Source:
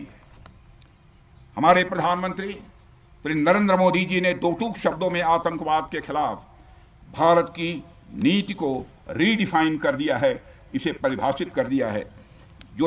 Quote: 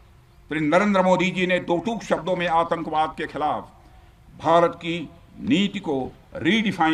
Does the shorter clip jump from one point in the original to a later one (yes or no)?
no